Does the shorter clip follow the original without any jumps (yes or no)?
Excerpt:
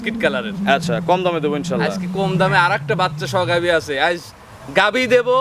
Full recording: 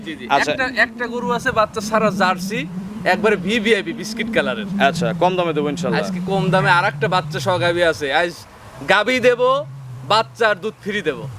yes